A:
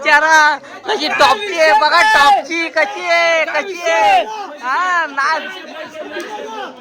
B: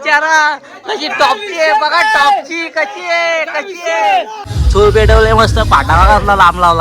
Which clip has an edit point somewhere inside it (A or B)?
B